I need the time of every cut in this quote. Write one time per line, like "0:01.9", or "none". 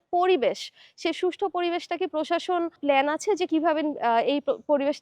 0:02.8